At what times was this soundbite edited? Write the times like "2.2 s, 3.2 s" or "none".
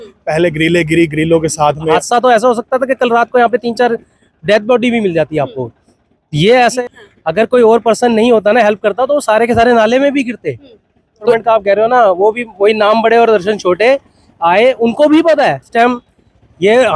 2.0 s, 6.8 s, 11.3 s, 15.6 s